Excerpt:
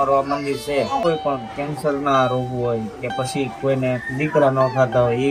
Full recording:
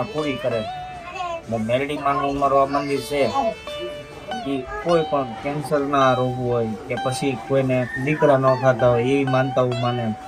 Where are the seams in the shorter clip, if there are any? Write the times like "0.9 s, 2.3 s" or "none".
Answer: 1.0 s